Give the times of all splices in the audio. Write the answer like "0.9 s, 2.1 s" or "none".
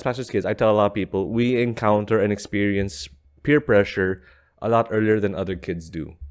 none